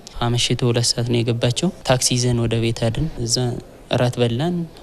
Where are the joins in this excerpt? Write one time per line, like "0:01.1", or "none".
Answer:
none